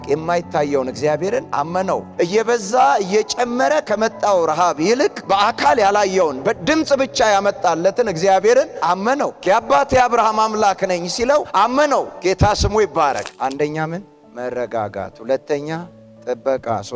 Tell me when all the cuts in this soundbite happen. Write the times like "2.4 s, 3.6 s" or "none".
2.1 s, 5.2 s, 9.4 s, 11.5 s, 13.3 s